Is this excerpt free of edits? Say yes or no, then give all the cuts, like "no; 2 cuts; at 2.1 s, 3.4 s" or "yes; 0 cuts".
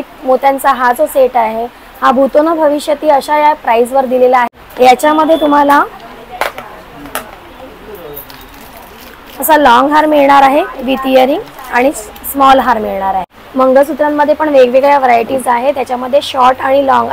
no; 2 cuts; at 4.5 s, 13.4 s